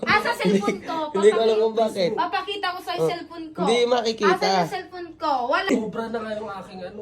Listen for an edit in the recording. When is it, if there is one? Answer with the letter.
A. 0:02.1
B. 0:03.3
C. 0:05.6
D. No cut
C